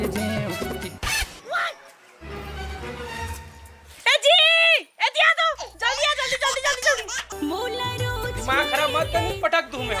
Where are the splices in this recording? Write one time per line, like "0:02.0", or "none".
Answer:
0:07.3